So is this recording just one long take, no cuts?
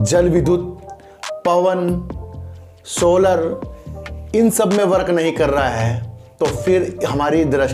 yes; 0 cuts

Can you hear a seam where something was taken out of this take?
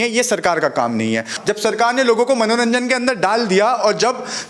yes; 1 cut; at 1.3 s

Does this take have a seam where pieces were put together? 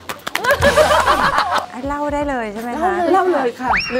yes; 1 cut; at 1.7 s

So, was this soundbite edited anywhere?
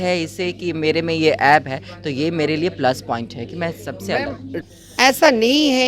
yes; 1 cut; at 4.6 s

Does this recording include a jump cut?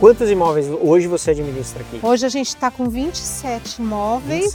no; 0 cuts

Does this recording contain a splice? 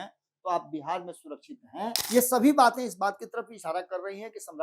yes; 1 cut; at 2.0 s

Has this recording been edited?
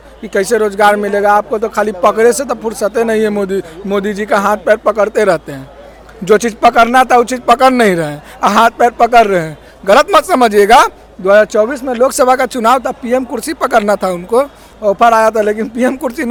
no; 0 cuts

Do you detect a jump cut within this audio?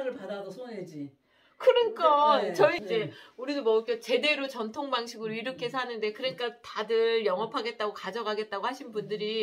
yes; 1 cut; at 2.8 s

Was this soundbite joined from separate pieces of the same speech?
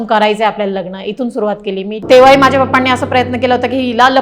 yes; 1 cut; at 2.0 s

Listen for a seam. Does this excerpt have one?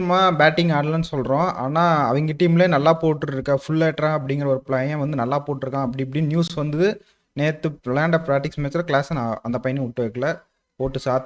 no; 0 cuts

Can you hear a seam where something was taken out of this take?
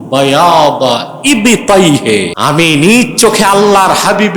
yes; 1 cut; at 2.3 s

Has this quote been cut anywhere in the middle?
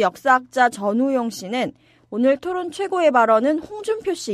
no; 0 cuts

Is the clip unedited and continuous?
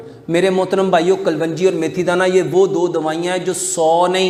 yes; 0 cuts

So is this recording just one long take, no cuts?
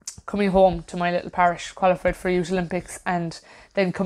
yes; 0 cuts

